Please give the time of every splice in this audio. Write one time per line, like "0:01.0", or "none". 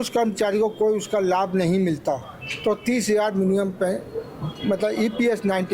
none